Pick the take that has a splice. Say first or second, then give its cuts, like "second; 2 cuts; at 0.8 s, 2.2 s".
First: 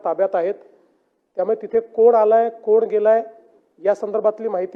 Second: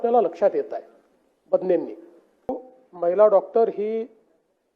second; 1 cut; at 2.7 s